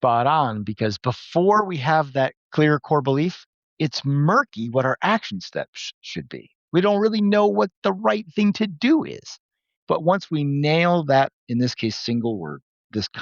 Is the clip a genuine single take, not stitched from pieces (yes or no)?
no